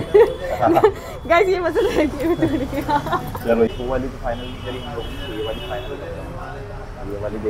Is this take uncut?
yes; 0 cuts

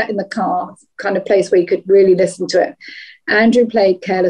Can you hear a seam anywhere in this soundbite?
no; 0 cuts

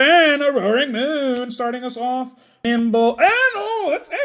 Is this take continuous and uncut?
no; 1 cut; at 2.6 s

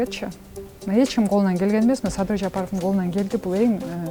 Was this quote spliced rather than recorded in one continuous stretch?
no; 0 cuts

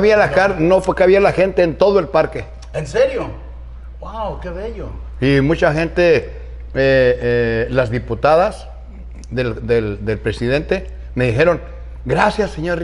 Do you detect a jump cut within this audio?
no; 0 cuts

